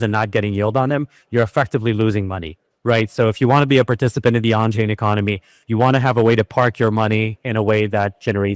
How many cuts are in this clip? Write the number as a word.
zero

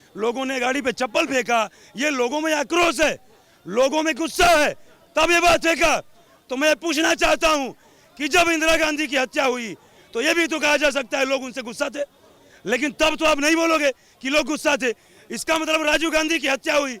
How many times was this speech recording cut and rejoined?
zero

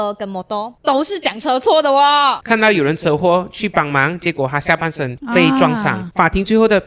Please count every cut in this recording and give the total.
two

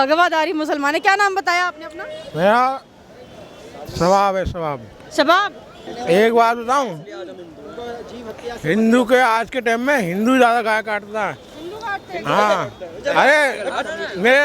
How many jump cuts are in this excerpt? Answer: one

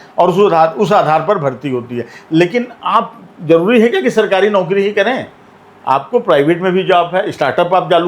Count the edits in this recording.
zero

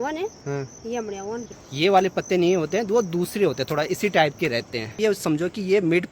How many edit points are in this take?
two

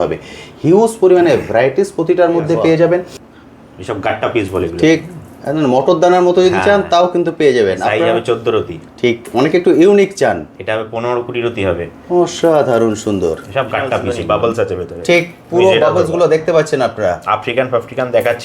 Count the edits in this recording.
two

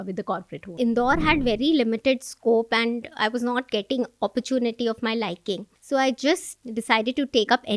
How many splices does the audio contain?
three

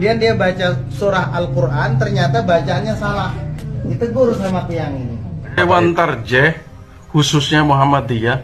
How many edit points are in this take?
one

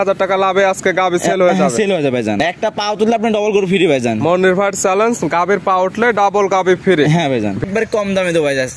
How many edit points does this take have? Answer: two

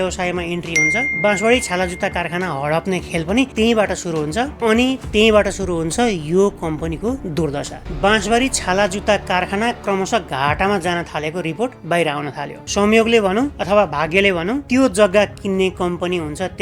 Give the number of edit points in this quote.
two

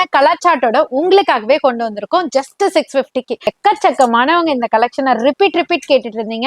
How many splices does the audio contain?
one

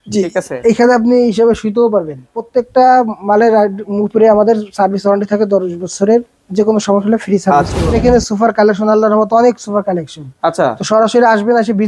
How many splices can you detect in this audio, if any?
two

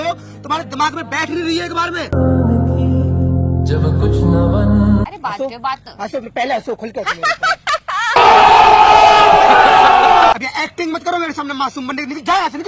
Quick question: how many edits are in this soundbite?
two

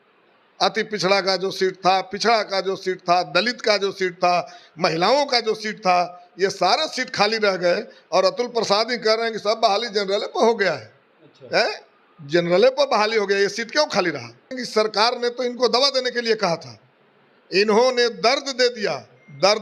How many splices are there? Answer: one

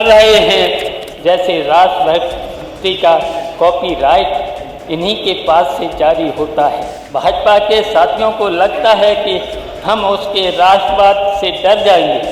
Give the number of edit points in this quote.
two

